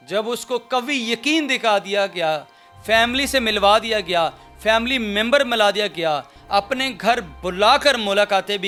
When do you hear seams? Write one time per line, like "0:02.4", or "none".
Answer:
none